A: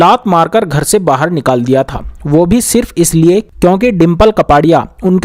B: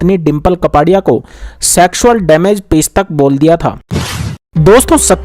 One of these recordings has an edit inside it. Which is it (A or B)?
B